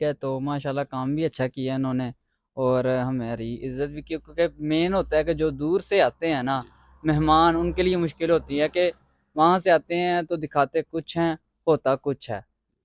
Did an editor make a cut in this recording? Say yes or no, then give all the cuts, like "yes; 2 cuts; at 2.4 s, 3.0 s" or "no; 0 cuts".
no; 0 cuts